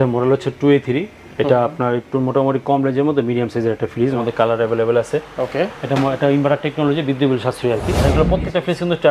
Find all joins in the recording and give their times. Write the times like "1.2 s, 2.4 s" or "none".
4.2 s, 8.0 s